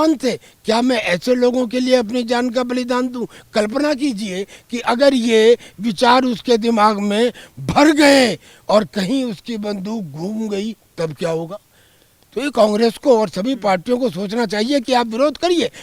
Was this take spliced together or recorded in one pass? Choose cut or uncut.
uncut